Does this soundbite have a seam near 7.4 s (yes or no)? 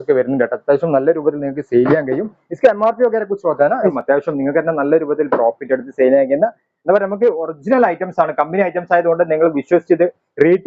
no